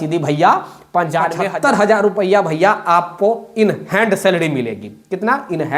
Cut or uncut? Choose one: cut